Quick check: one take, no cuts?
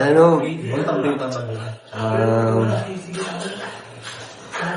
yes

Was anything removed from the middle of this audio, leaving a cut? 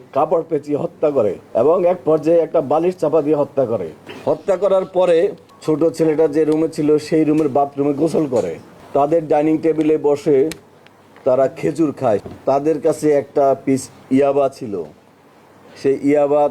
yes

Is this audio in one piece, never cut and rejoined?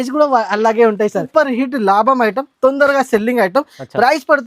no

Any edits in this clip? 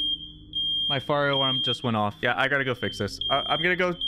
yes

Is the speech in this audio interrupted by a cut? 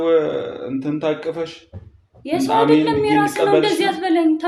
no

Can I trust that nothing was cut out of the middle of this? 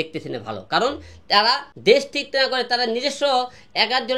no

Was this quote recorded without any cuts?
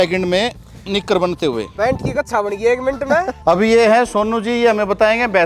no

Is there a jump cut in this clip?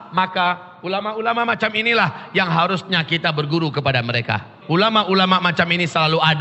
yes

